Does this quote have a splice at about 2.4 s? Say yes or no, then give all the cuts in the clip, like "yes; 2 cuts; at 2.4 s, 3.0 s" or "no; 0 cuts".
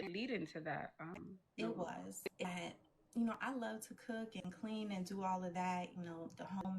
yes; 1 cut; at 2.4 s